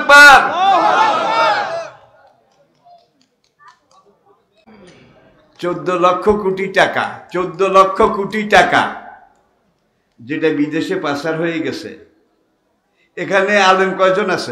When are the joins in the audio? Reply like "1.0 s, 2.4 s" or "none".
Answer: 4.7 s